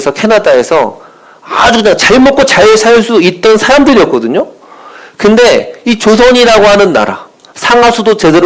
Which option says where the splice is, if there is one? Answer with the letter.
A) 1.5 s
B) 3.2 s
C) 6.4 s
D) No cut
D